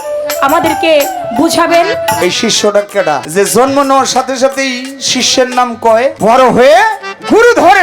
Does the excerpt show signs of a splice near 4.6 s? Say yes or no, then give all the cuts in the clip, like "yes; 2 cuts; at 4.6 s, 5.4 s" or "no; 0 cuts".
no; 3 cuts; at 2.2 s, 3.3 s, 6.2 s